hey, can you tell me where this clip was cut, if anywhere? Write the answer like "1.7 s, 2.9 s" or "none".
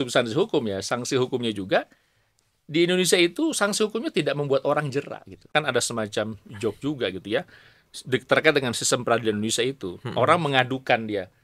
5.5 s

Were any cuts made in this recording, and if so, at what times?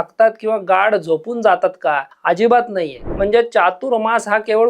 2.1 s, 3.0 s

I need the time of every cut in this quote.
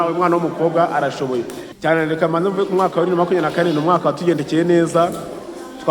1.6 s

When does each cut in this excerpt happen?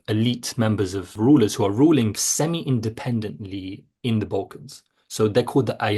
1.1 s, 2.2 s

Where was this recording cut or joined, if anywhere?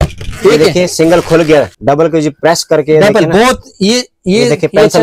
1.7 s

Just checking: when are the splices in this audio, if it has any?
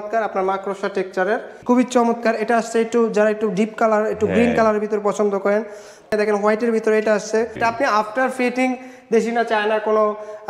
1.5 s, 6.1 s, 7.5 s

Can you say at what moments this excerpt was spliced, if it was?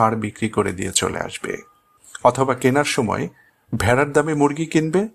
none

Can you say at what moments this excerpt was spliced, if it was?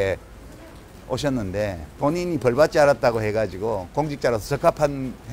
1.9 s

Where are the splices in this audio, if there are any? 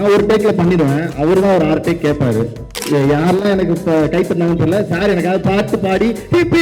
2.8 s

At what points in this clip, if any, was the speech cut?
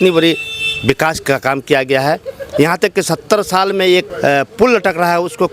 4.1 s

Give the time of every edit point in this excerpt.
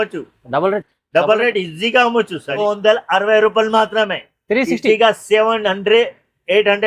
2.6 s

